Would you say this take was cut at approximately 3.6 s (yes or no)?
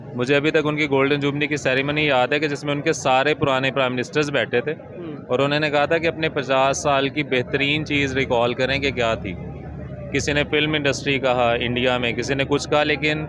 no